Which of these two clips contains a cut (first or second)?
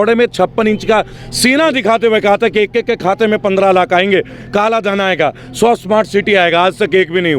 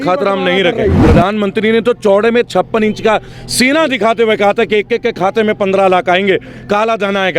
second